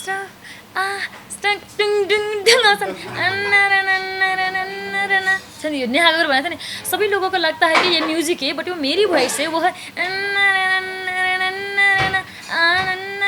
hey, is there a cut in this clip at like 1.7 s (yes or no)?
no